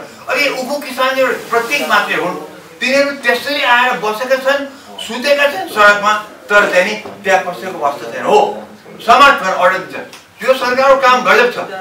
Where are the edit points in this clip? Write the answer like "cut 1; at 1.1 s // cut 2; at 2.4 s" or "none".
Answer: none

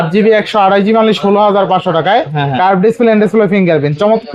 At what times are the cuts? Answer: none

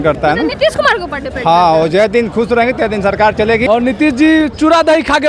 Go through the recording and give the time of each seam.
cut 1; at 3.6 s

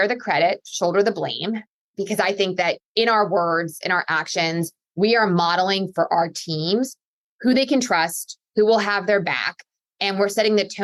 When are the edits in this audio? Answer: none

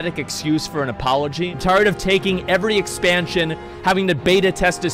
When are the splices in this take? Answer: cut 1; at 1.6 s

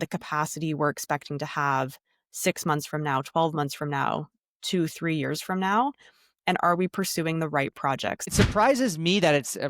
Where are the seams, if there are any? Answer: cut 1; at 8.2 s

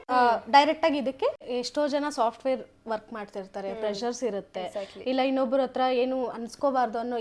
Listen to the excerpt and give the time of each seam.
cut 1; at 1.4 s

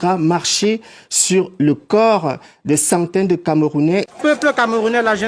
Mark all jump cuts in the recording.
cut 1; at 4.0 s

